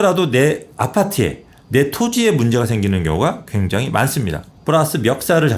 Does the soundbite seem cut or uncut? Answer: cut